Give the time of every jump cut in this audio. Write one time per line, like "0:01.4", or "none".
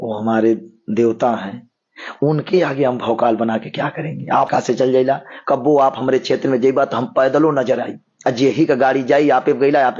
0:04.5